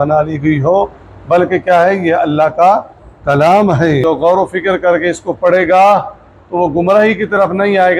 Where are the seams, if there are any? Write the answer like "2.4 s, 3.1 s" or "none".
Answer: 4.0 s